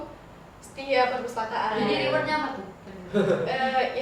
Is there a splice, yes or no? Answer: no